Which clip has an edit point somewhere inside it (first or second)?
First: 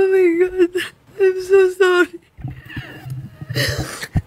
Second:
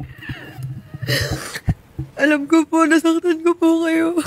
first